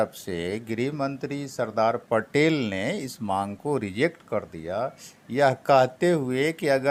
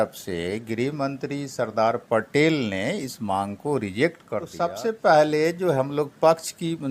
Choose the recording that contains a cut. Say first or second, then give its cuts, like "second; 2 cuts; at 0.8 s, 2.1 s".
second; 1 cut; at 4.5 s